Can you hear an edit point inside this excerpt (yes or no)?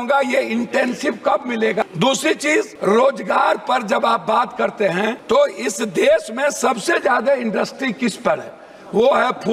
yes